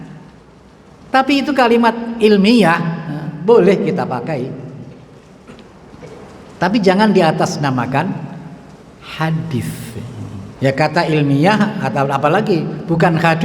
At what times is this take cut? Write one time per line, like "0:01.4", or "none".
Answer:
0:10.4